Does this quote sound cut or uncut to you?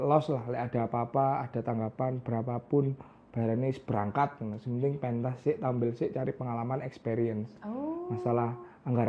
uncut